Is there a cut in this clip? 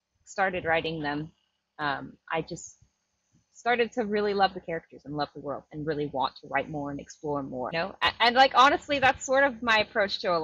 yes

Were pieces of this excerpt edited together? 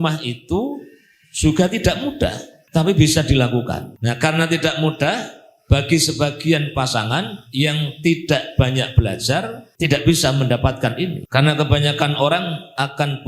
yes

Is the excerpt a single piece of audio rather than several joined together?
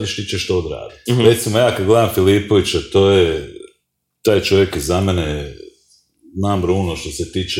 no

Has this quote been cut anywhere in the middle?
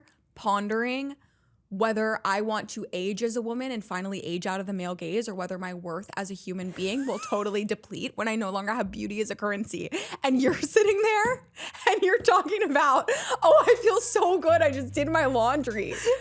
no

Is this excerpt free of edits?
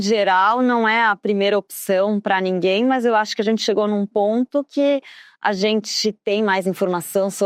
yes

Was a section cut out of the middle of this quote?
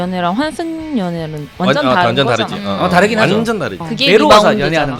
yes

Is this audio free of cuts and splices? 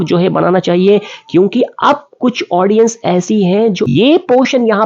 no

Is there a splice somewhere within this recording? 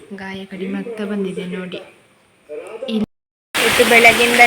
yes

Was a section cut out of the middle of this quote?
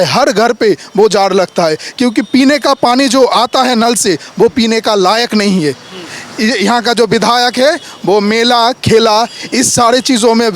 no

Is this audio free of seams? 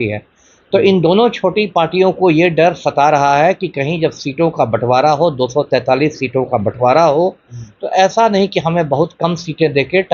yes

